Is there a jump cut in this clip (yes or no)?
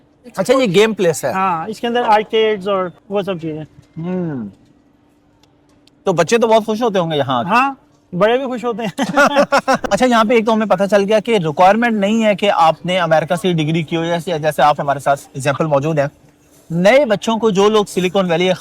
yes